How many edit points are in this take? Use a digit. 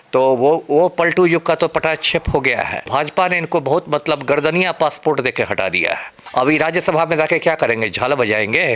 2